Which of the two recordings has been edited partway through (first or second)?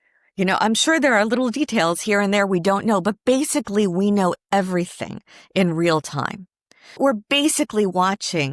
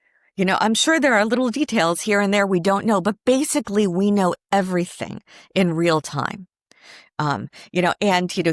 first